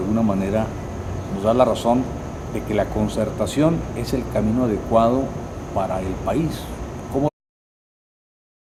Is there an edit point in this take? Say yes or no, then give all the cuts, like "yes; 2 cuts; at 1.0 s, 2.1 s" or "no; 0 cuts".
no; 0 cuts